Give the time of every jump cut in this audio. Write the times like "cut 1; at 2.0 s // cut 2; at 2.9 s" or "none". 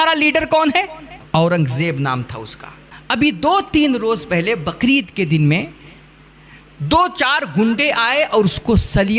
cut 1; at 1.1 s